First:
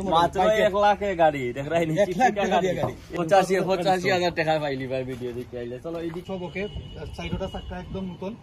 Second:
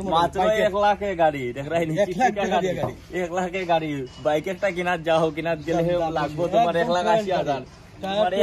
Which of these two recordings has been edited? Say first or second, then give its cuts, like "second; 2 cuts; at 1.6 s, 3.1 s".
first; 2 cuts; at 3.1 s, 6.2 s